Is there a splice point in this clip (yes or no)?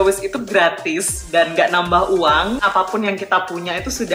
yes